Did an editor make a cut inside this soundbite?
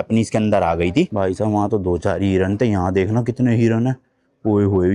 yes; 1 cut; at 1.1 s

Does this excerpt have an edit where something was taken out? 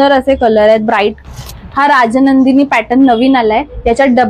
yes; 1 cut; at 1.2 s

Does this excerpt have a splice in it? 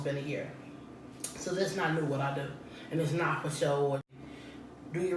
yes; 1 cut; at 4.0 s

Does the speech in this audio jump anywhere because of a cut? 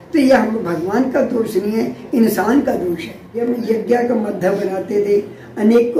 yes; 1 cut; at 3.4 s

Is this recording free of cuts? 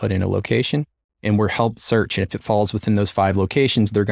yes; 0 cuts

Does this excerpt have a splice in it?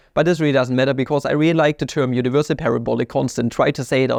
no; 0 cuts

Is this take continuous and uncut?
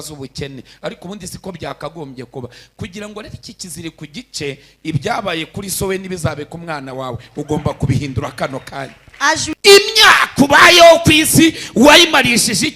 no; 1 cut; at 9.5 s

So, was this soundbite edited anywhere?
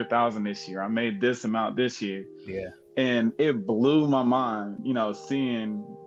no; 0 cuts

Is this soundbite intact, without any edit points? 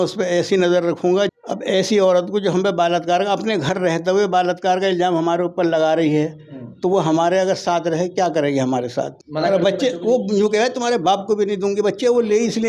no; 2 cuts; at 1.3 s, 9.2 s

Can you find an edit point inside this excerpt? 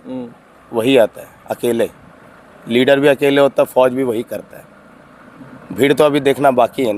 no; 0 cuts

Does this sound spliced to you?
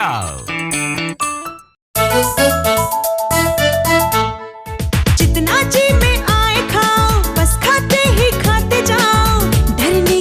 yes; 1 cut; at 1.8 s

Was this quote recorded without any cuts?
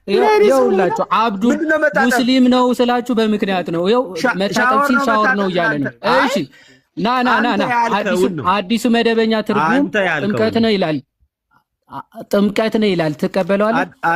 yes; 0 cuts

